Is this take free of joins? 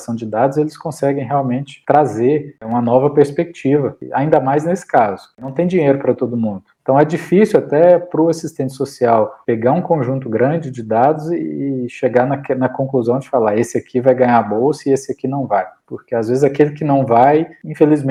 yes; 0 cuts

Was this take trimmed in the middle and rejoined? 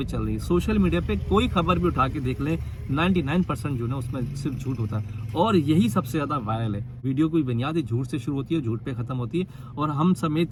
no; 0 cuts

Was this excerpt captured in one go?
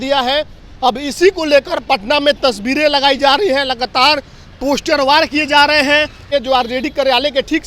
no; 1 cut; at 6.3 s

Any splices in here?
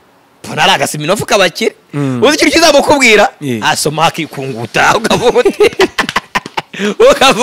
no; 0 cuts

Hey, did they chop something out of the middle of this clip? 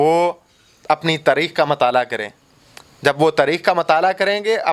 no; 0 cuts

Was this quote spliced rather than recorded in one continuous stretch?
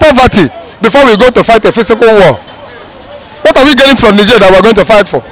no; 0 cuts

